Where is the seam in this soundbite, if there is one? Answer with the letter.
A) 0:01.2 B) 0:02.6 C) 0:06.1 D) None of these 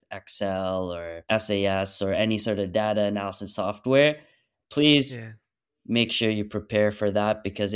A